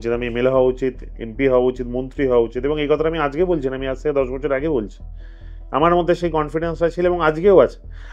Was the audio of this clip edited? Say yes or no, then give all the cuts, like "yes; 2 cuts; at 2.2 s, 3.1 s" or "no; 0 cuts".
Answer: no; 0 cuts